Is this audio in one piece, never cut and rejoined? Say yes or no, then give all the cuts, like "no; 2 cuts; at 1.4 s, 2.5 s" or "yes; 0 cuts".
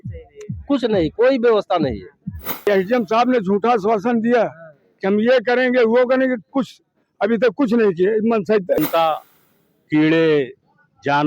no; 2 cuts; at 2.7 s, 8.8 s